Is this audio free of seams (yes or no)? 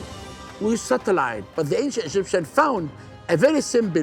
no